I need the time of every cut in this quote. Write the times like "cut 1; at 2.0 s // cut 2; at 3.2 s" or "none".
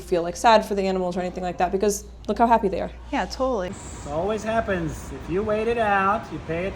cut 1; at 3.7 s